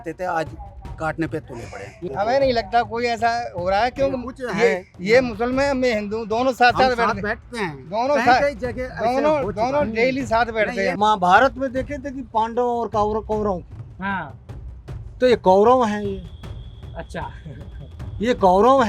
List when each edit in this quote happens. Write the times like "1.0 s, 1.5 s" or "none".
2.0 s, 11.0 s